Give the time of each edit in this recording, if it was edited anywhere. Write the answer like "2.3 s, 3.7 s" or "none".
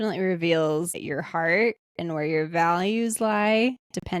1.0 s